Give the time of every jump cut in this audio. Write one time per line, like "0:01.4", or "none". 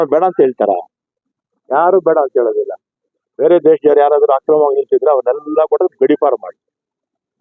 none